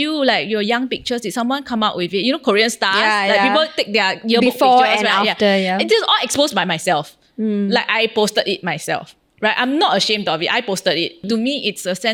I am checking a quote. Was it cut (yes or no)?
no